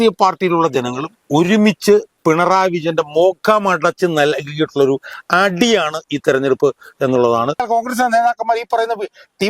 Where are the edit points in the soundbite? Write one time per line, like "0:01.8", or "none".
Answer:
0:07.6